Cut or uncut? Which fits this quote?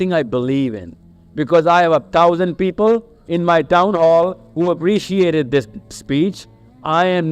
uncut